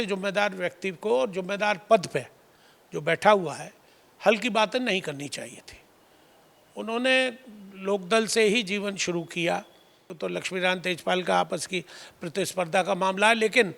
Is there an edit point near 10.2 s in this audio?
yes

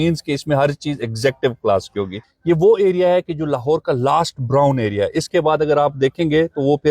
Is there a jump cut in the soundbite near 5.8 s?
no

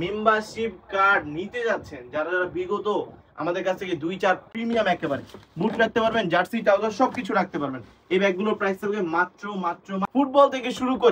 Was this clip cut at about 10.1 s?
yes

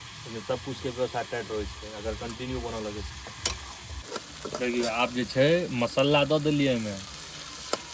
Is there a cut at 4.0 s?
yes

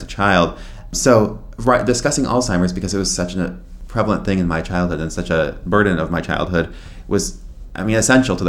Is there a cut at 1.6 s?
no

